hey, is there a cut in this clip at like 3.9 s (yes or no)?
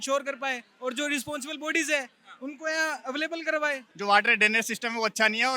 yes